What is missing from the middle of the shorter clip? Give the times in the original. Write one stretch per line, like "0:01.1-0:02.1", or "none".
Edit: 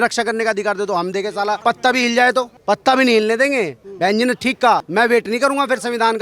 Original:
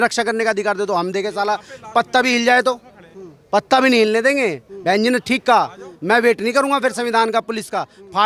0:01.6-0:01.9
0:02.8-0:03.4
0:05.7-0:06.0